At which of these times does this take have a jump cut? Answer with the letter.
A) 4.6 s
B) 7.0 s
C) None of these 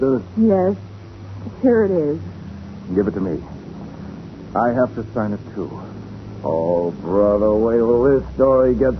B